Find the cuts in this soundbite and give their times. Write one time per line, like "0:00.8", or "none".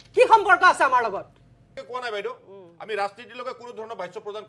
0:01.8

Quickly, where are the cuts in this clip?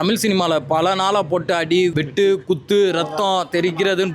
0:02.0

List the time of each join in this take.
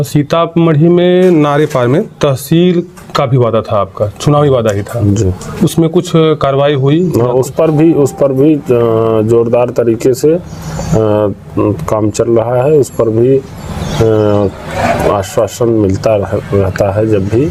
none

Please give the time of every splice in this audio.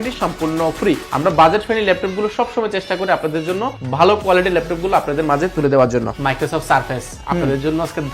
0:01.0
0:06.1

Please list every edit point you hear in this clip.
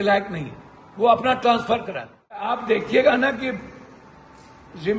0:02.4

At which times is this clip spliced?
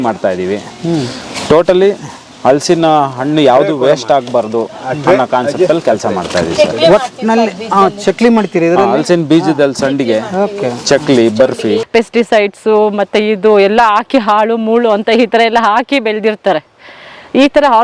0:11.8

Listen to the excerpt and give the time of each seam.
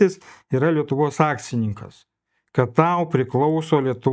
none

